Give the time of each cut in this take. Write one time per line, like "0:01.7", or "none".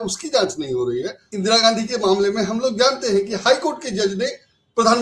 0:01.2

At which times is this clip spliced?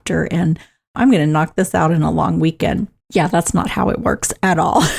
0:03.0

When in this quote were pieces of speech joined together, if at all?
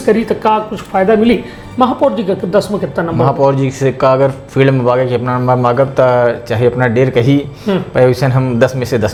none

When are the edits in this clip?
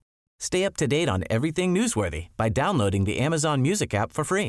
none

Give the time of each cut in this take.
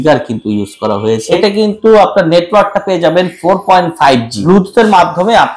0:01.3
0:04.4

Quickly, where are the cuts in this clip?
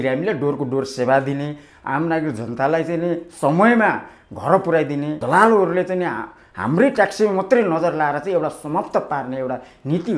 0:05.1

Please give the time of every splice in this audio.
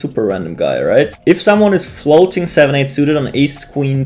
0:01.1

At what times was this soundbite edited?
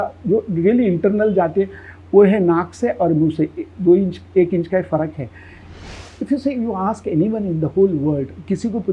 0:05.7

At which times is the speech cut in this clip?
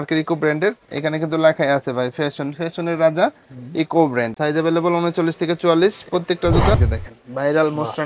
0:04.3
0:06.8

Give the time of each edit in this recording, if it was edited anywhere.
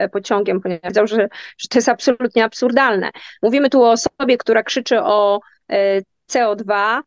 0:00.9

